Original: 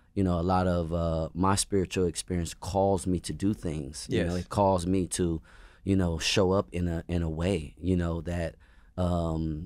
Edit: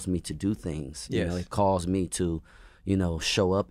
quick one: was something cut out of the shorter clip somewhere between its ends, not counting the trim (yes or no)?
no